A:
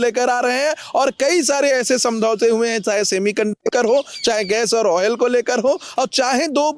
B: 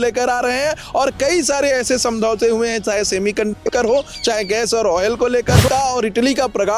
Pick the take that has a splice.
B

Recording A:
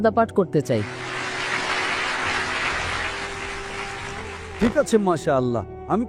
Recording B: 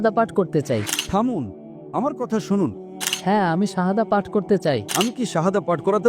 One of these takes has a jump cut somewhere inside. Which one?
B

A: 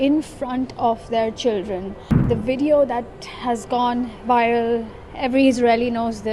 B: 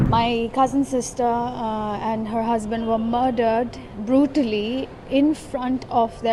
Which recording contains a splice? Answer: A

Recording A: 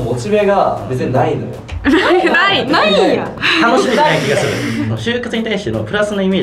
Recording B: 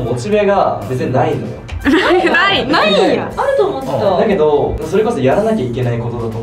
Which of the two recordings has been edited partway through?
A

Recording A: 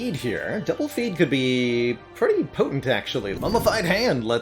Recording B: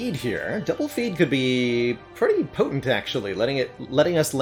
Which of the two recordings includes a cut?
A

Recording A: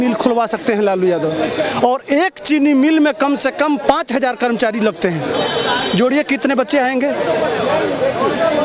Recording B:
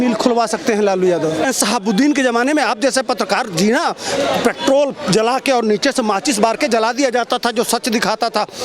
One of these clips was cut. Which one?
B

